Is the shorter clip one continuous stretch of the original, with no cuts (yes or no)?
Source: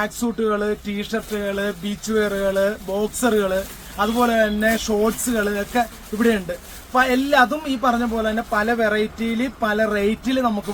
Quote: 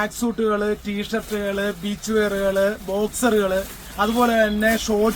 yes